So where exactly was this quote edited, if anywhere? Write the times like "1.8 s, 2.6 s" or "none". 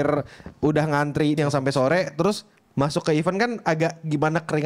1.4 s